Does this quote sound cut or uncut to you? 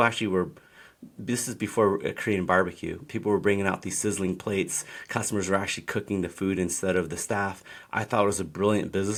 uncut